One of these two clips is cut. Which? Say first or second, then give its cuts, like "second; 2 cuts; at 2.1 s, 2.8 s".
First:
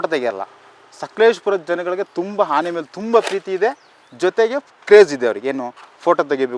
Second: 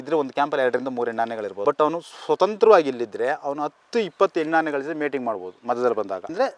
second; 1 cut; at 1.5 s